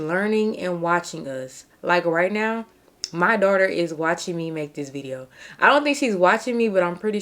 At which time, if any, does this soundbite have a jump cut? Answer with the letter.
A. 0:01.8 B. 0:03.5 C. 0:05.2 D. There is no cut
D